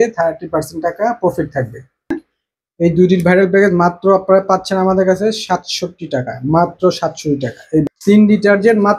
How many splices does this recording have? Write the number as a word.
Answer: two